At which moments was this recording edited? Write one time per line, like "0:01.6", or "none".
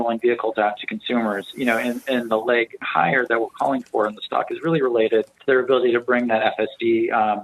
0:05.3